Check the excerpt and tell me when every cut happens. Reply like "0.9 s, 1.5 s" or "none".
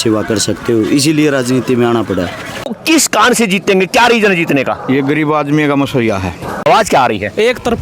2.7 s, 6.7 s